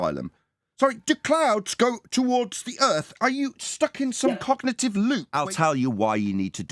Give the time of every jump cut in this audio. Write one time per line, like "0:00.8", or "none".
0:05.3